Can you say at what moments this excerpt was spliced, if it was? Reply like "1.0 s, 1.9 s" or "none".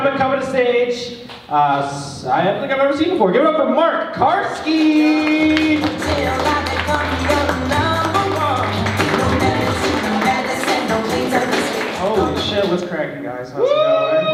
none

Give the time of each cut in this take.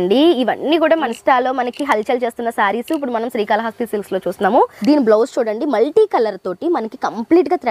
1.1 s, 4.8 s

